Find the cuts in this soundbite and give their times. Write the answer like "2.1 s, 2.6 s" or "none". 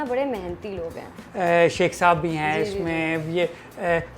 1.2 s